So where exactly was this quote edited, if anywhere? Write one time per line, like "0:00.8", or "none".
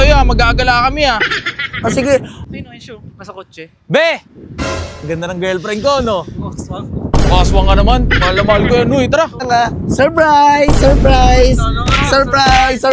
0:02.4
0:09.4